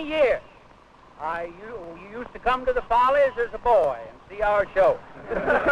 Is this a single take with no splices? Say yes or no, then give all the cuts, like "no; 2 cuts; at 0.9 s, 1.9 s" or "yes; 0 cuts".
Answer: yes; 0 cuts